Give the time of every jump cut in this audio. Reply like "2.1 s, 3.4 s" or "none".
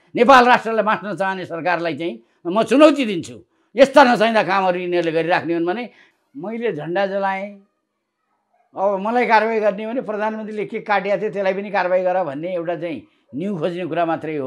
6.0 s